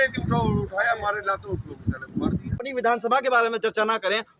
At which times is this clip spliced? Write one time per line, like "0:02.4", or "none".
0:02.6